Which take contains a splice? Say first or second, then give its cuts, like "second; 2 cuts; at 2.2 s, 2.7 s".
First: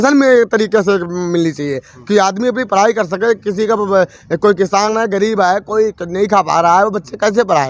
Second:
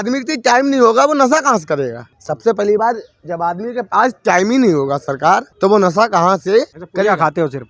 second; 3 cuts; at 2.1 s, 5.5 s, 6.8 s